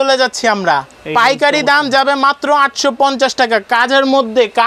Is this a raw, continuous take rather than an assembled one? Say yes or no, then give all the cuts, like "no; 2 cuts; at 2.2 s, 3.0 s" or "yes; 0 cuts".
yes; 0 cuts